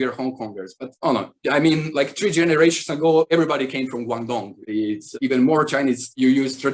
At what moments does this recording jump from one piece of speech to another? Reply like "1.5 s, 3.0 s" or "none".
none